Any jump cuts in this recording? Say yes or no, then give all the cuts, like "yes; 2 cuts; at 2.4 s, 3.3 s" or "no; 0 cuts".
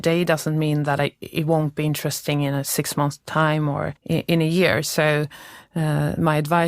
yes; 1 cut; at 4.0 s